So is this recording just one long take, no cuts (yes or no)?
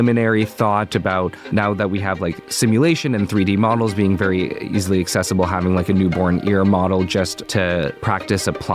no